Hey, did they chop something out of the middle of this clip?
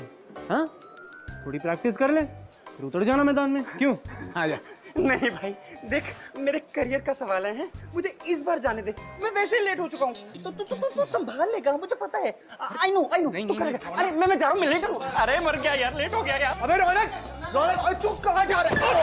no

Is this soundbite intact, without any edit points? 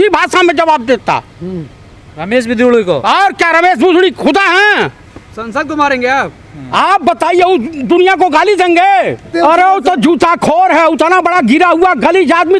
no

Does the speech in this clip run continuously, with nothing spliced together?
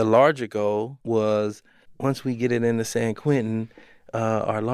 no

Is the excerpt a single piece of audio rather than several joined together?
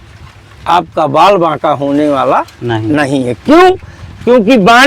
yes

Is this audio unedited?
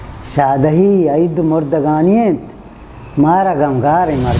yes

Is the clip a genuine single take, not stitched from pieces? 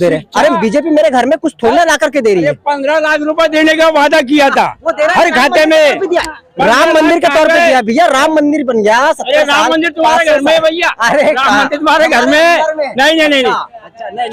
yes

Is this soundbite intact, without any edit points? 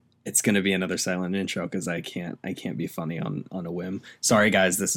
yes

